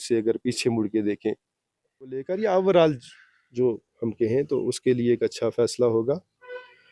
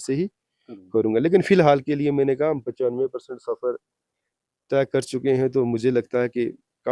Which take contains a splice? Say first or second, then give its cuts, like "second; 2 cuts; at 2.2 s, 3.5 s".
first; 1 cut; at 2.3 s